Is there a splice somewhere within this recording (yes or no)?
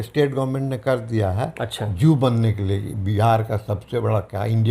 no